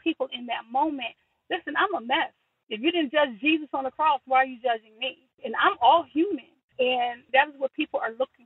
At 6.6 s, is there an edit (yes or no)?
yes